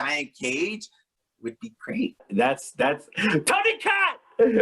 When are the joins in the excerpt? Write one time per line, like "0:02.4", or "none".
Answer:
0:02.2